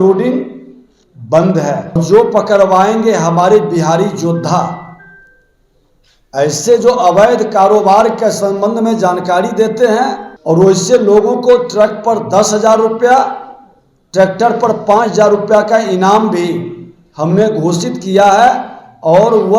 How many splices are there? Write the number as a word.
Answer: two